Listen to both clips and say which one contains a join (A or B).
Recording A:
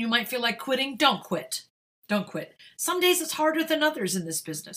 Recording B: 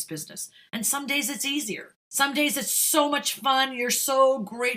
B